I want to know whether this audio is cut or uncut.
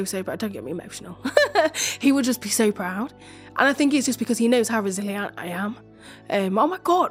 uncut